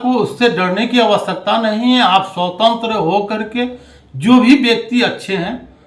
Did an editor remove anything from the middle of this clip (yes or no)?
no